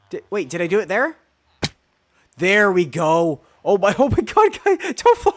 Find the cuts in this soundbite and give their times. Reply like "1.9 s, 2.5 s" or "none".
none